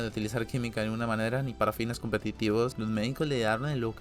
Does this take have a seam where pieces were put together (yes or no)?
yes